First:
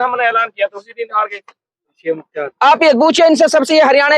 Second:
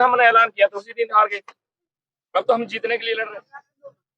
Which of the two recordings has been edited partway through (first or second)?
first